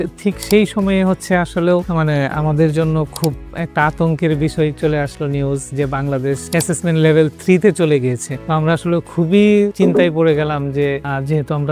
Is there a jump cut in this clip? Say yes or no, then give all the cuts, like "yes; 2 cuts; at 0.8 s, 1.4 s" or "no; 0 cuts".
no; 0 cuts